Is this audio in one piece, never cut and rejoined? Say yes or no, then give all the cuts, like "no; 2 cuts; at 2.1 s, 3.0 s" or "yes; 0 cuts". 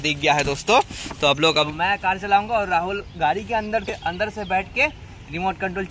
no; 1 cut; at 1.7 s